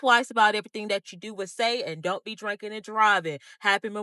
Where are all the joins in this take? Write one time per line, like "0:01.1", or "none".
none